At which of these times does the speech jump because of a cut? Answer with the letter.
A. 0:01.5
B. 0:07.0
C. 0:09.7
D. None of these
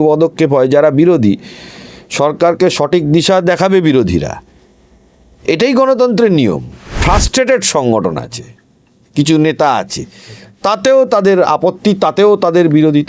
B